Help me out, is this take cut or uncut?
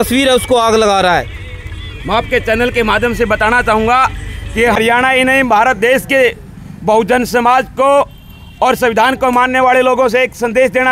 uncut